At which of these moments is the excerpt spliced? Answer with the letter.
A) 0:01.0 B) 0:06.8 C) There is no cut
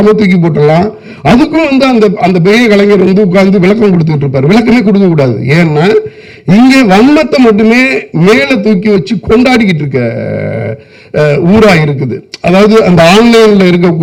C